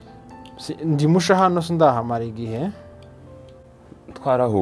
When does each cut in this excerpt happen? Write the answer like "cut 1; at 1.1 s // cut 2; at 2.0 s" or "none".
none